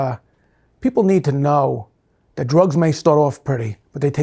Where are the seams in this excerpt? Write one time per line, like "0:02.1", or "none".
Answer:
none